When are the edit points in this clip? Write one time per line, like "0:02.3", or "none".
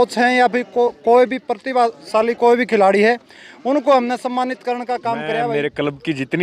0:05.5